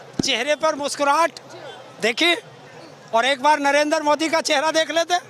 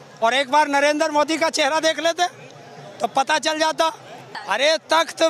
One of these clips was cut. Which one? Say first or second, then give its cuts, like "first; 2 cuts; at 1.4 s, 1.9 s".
second; 1 cut; at 4.4 s